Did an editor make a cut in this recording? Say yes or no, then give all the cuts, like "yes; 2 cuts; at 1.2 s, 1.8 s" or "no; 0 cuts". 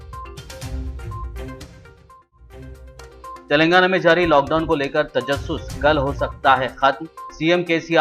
yes; 1 cut; at 3.0 s